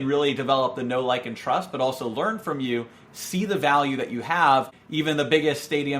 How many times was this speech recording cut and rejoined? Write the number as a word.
one